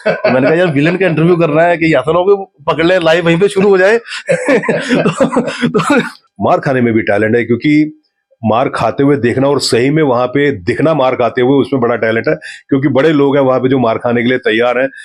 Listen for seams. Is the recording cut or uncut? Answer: cut